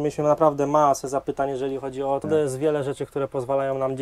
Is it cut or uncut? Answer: cut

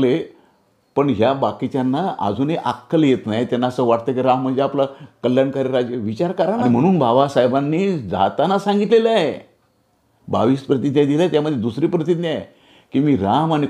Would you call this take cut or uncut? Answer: cut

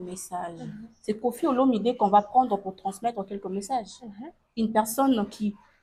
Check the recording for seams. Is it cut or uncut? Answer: uncut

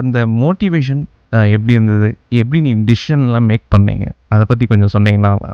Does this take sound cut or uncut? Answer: uncut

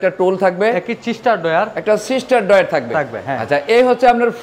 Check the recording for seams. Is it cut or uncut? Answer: uncut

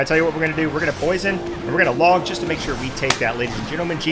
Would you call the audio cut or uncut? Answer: uncut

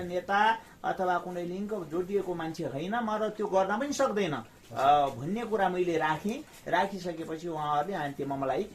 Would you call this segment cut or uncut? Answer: uncut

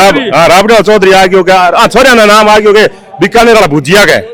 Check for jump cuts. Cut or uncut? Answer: uncut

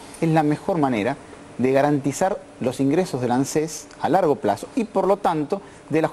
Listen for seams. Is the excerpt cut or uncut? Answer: uncut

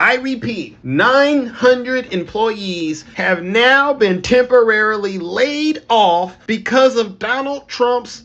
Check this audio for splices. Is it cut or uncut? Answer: uncut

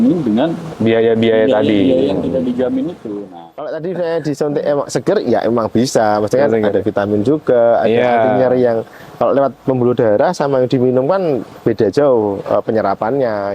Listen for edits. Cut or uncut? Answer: cut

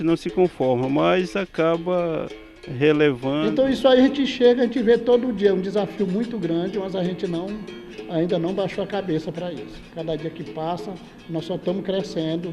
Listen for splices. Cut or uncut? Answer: cut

